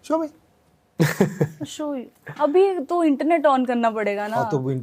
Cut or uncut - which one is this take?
uncut